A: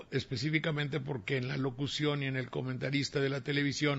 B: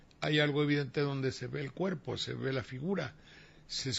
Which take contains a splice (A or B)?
A